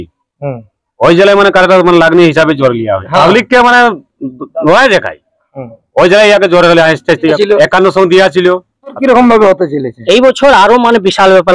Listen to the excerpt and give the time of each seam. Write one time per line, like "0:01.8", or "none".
0:03.0
0:07.4
0:09.0